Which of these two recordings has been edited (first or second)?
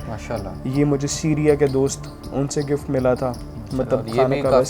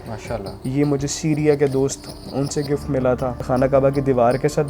second